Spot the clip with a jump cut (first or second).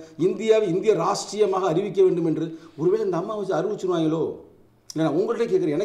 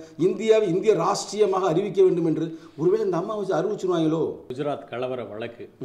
second